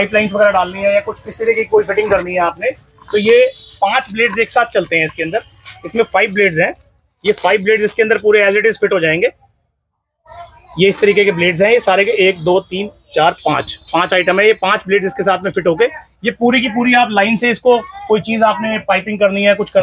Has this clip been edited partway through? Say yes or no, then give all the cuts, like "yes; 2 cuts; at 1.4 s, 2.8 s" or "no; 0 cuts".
no; 0 cuts